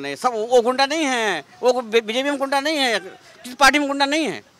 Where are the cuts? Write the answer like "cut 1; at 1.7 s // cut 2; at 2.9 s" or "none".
none